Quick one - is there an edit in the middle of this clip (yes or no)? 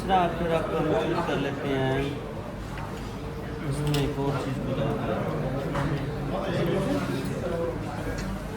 no